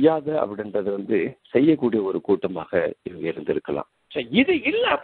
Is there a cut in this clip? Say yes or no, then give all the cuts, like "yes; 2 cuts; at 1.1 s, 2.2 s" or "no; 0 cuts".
yes; 1 cut; at 4.0 s